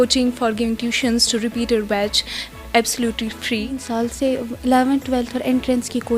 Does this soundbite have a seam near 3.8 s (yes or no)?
yes